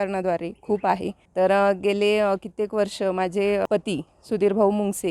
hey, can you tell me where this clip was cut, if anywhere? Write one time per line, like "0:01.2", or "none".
0:01.2
0:03.7